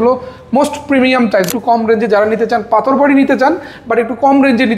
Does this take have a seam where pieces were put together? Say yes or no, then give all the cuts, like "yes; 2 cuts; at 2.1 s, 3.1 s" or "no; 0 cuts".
yes; 1 cut; at 1.5 s